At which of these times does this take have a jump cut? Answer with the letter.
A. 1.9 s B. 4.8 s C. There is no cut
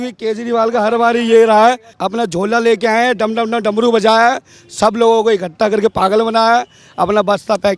A